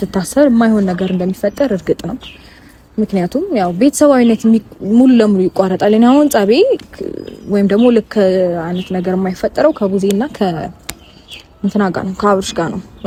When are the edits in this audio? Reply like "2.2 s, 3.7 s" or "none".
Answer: none